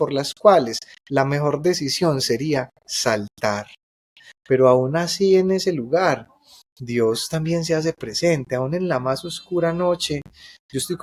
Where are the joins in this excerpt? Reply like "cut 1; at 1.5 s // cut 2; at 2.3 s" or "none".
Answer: none